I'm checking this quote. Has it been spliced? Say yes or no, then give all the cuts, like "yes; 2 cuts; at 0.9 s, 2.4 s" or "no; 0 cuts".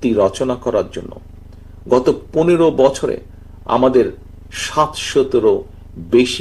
no; 0 cuts